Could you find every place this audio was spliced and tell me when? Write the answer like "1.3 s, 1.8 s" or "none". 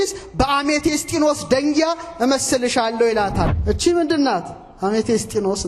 3.5 s